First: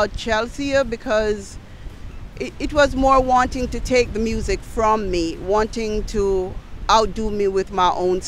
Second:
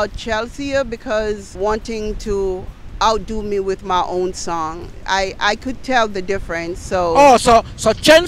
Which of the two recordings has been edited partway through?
second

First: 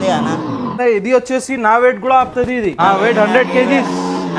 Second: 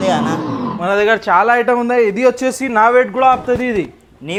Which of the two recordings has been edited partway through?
first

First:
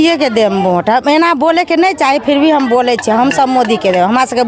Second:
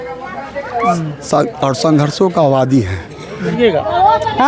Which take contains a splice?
second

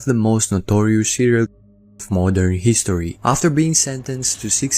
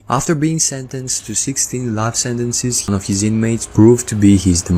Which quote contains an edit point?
second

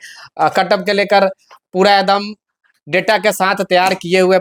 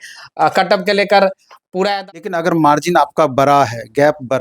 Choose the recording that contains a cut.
second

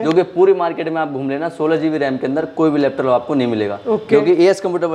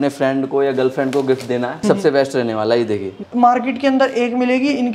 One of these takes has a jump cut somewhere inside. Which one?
second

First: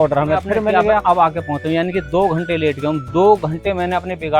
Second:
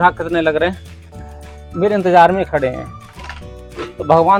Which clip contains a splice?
first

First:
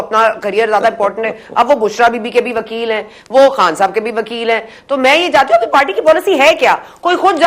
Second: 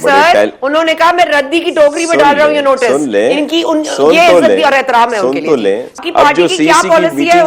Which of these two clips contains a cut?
second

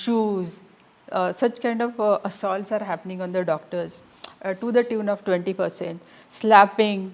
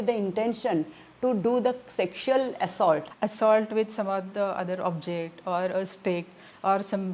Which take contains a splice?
second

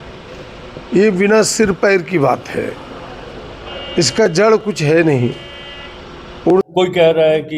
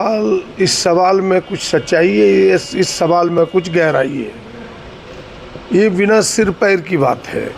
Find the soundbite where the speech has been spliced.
first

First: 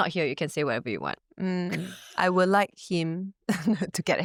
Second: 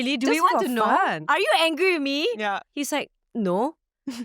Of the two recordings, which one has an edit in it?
second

